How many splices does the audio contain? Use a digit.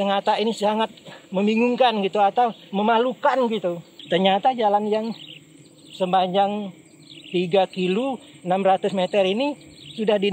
1